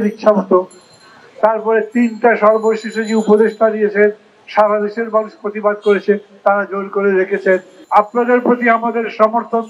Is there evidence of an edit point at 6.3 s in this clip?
no; 1 cut; at 7.8 s

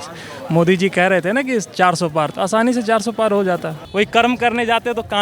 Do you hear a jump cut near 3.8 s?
yes; 1 cut; at 3.8 s

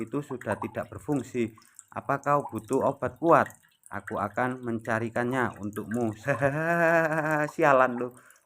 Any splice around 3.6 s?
no; 1 cut; at 6.2 s

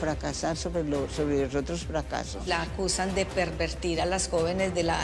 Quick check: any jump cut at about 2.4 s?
yes; 1 cut; at 2.4 s

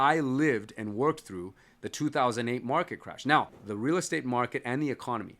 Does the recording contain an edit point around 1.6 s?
no; 1 cut; at 3.6 s

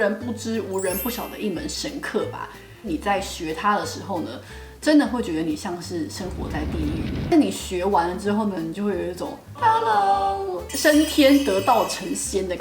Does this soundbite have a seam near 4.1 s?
no; 2 cuts; at 2.9 s, 7.3 s

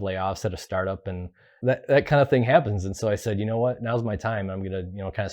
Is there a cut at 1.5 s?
yes; 1 cut; at 1.5 s

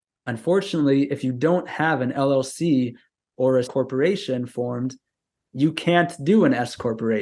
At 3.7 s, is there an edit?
yes; 1 cut; at 3.7 s

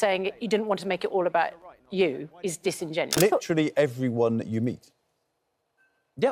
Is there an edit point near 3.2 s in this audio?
yes; 1 cut; at 3.2 s

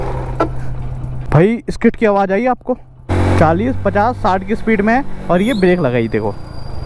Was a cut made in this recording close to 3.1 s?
yes; 2 cuts; at 1.2 s, 3.1 s

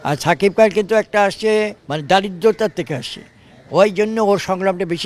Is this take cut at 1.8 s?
yes; 1 cut; at 1.8 s

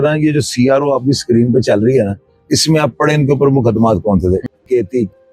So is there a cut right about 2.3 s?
no; 0 cuts

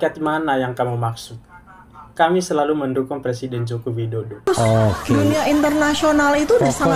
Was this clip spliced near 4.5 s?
yes; 1 cut; at 4.5 s

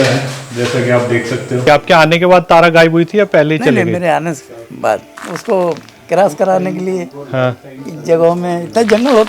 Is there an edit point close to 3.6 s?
no; 2 cuts; at 1.6 s, 5.1 s

